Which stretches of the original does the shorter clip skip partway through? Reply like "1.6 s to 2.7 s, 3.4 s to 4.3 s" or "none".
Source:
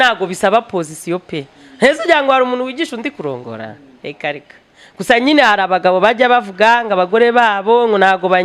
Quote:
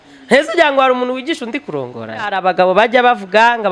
3.8 s to 5.6 s